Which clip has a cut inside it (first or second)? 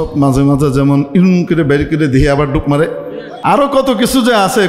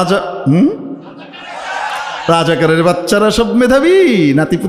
first